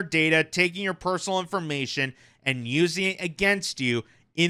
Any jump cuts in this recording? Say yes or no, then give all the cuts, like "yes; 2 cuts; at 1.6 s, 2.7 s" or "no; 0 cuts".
no; 0 cuts